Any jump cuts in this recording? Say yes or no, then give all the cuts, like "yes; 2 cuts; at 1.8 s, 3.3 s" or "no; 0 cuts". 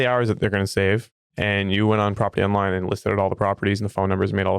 yes; 1 cut; at 1.2 s